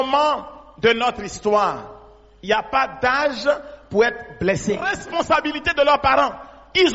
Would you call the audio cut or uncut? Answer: cut